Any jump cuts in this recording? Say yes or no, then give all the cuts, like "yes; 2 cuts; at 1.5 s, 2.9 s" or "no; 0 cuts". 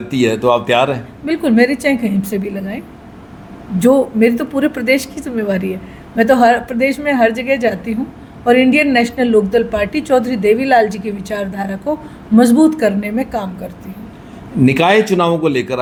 no; 0 cuts